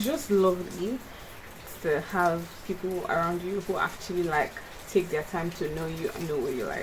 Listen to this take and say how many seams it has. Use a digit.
0